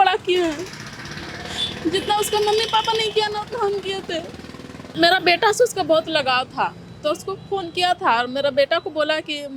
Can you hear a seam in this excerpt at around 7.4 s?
no; 1 cut; at 4.8 s

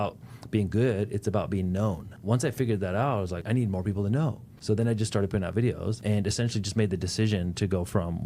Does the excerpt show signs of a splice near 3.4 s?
yes; 4 cuts; at 2.1 s, 3.4 s, 4.5 s, 6.0 s

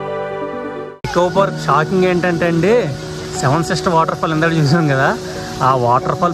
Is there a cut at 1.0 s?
yes; 1 cut; at 1.0 s

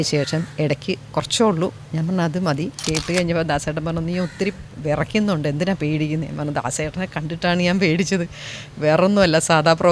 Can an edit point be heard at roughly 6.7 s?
no; 1 cut; at 2.8 s

